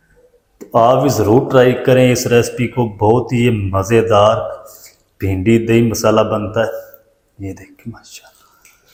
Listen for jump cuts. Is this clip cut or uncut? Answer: uncut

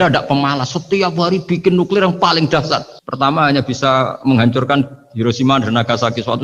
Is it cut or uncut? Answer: uncut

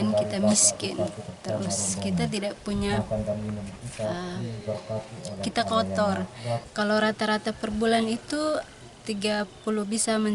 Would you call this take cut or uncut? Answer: cut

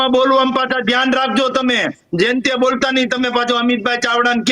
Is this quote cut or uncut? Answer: uncut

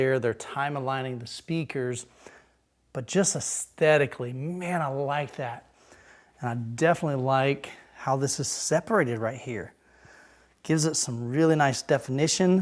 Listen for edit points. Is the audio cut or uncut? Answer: uncut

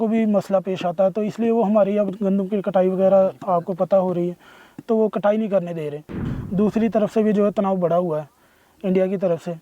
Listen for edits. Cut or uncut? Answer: cut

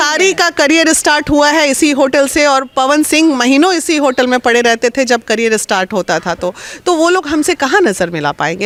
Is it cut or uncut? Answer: uncut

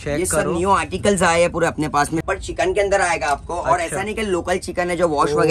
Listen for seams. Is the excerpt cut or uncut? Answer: cut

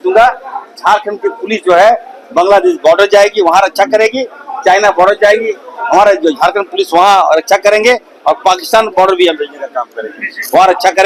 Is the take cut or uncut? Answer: uncut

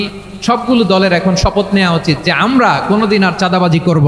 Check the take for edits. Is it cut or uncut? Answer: uncut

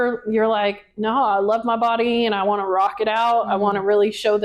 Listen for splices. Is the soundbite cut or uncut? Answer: uncut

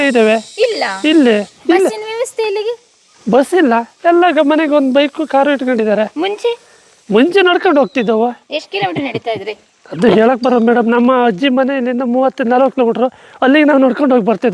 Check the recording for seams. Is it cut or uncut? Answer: uncut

